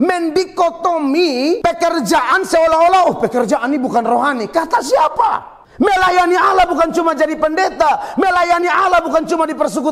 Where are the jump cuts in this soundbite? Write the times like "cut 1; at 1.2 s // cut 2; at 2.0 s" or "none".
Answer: cut 1; at 1.6 s // cut 2; at 5.6 s